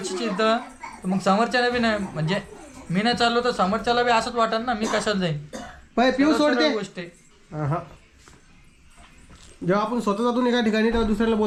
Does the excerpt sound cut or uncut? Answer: uncut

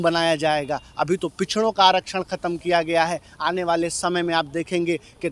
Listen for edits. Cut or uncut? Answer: uncut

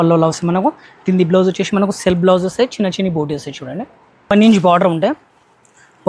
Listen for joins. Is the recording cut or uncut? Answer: cut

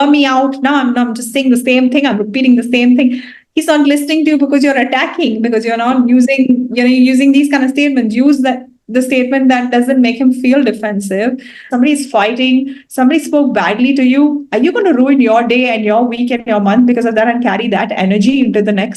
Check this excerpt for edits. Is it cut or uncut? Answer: cut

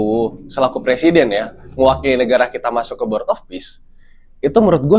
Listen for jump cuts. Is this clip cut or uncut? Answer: uncut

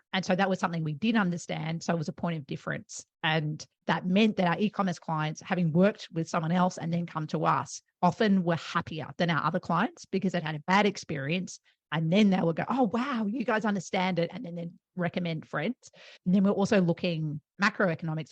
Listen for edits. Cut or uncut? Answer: cut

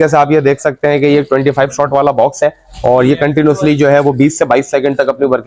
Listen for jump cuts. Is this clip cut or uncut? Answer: uncut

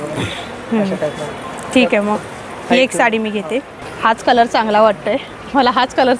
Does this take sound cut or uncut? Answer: cut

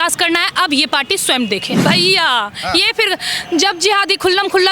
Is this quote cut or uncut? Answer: cut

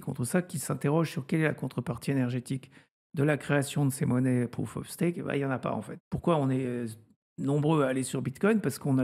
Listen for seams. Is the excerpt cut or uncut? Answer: cut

